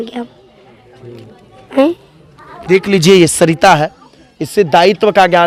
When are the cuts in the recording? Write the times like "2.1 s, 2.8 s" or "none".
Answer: none